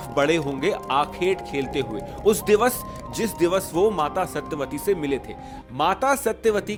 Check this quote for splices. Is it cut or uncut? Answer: uncut